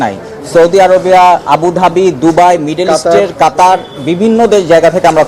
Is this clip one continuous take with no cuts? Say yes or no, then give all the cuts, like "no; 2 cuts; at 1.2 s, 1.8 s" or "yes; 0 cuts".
yes; 0 cuts